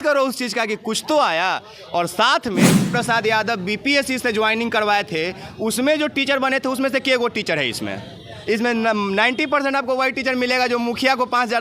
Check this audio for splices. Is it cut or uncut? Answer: cut